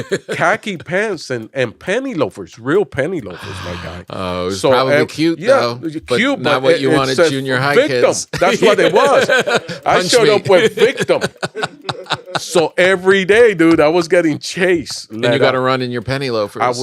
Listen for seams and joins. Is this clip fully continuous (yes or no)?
no